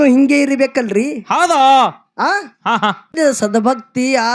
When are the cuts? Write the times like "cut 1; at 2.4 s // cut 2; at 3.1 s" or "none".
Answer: cut 1; at 3.1 s